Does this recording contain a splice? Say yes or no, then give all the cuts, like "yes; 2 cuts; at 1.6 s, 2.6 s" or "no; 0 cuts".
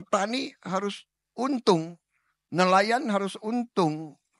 no; 0 cuts